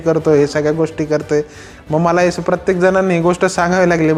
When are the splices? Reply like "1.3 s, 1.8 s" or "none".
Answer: none